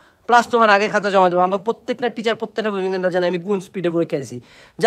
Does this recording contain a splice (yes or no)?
no